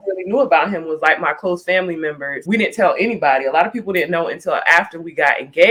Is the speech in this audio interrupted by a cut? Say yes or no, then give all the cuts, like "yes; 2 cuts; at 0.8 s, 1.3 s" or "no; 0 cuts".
no; 0 cuts